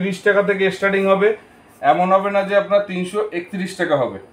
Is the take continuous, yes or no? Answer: yes